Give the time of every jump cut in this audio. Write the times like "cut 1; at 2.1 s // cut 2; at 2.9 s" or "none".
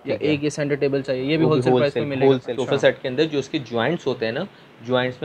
cut 1; at 2.5 s